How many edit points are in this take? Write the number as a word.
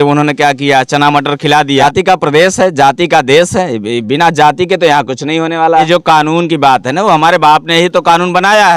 two